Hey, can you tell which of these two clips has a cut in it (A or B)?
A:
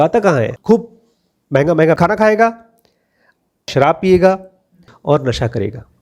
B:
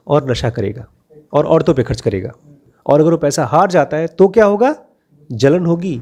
A